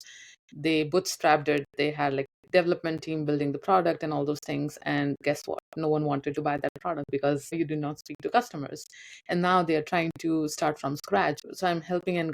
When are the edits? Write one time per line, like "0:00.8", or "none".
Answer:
0:07.5
0:11.4